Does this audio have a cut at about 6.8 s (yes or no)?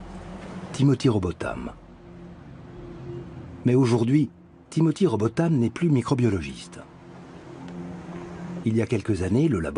yes